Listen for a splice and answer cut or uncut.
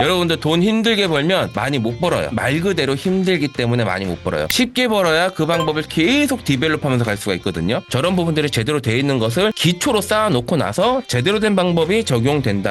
cut